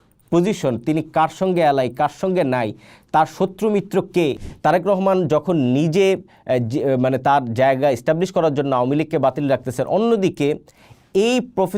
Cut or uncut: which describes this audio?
cut